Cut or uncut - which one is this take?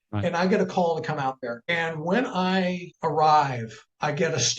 cut